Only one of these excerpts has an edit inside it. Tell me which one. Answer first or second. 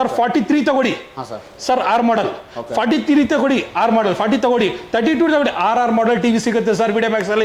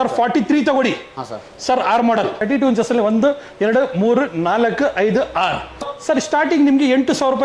second